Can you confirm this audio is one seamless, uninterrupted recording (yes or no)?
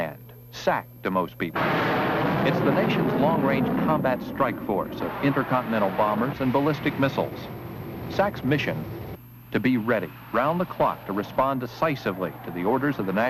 yes